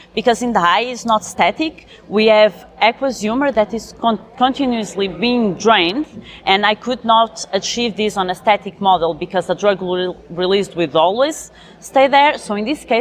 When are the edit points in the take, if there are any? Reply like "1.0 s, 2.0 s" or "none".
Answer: none